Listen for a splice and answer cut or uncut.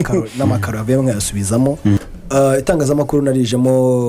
cut